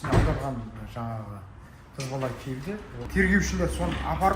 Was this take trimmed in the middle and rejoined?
yes; 1 cut; at 2.9 s

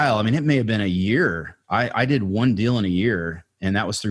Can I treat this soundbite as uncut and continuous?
yes; 0 cuts

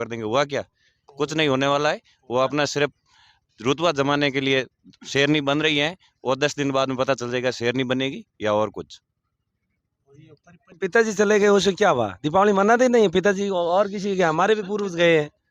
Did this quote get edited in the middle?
yes; 1 cut; at 10.7 s

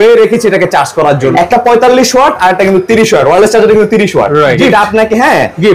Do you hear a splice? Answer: yes; 2 cuts; at 1.3 s, 4.5 s

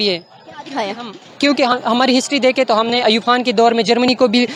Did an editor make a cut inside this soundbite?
no; 0 cuts

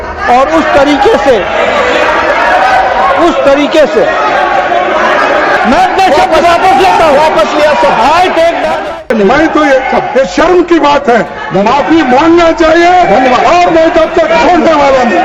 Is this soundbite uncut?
no; 2 cuts; at 5.6 s, 9.0 s

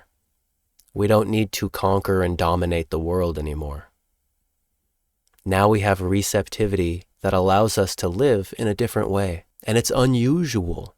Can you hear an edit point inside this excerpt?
yes; 2 cuts; at 7.1 s, 9.5 s

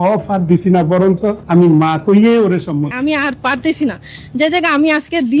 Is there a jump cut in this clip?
yes; 2 cuts; at 1.4 s, 2.9 s

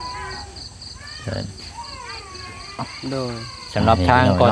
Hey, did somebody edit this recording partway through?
yes; 1 cut; at 2.8 s

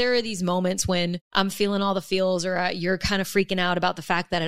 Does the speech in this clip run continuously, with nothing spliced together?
no; 1 cut; at 1.2 s

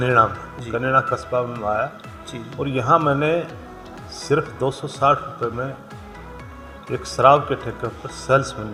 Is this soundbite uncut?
yes; 0 cuts

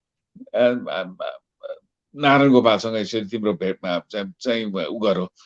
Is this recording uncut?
yes; 0 cuts

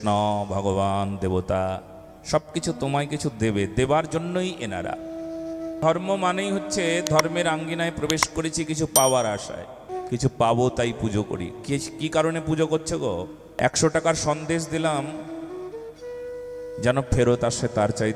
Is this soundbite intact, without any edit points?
no; 3 cuts; at 5.8 s, 9.9 s, 13.4 s

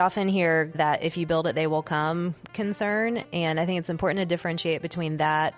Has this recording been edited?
no; 0 cuts

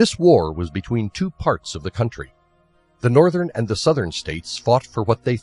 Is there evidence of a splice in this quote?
yes; 1 cut; at 3.9 s

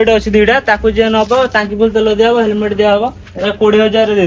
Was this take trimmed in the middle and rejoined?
no; 0 cuts

